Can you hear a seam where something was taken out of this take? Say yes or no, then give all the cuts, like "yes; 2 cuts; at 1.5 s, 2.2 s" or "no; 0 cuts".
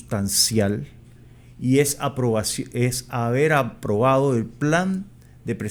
no; 0 cuts